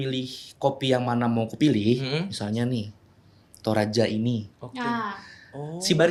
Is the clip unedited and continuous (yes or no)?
yes